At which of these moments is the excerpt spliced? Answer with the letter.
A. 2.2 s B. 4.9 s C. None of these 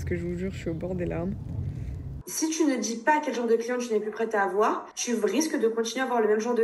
A